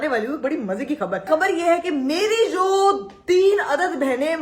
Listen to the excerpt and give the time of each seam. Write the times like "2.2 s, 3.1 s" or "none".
1.3 s